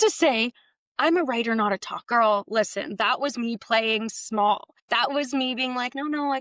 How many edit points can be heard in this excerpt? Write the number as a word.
two